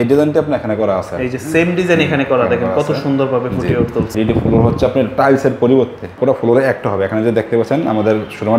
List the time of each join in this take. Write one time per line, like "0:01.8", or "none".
0:04.1
0:06.1